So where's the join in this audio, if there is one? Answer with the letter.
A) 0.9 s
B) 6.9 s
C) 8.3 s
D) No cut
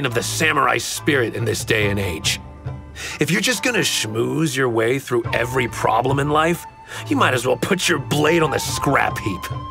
D